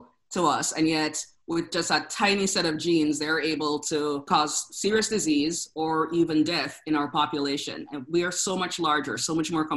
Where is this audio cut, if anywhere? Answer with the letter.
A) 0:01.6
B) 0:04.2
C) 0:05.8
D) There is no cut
B